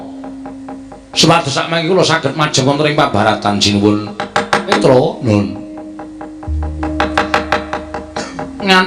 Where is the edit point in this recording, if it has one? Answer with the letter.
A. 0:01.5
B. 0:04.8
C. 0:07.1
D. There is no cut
B